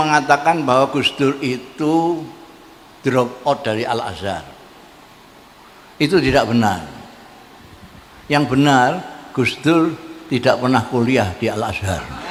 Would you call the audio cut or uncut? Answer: uncut